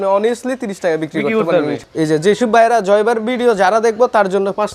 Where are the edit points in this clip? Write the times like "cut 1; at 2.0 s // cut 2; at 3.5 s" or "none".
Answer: cut 1; at 1.8 s